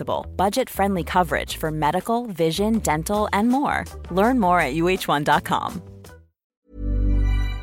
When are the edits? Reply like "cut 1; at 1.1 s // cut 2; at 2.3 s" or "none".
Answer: cut 1; at 6.5 s